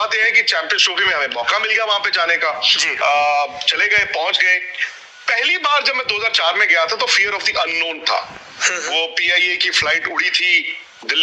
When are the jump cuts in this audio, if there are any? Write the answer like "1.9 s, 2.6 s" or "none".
none